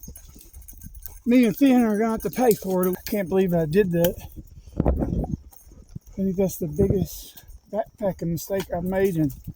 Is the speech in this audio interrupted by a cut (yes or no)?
yes